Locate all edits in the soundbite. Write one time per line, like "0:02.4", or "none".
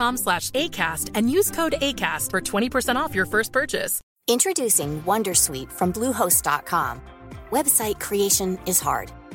0:04.0